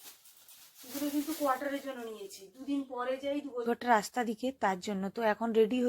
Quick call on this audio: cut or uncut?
cut